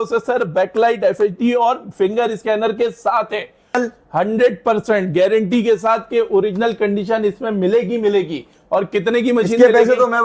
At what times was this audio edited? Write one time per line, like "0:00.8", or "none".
0:03.7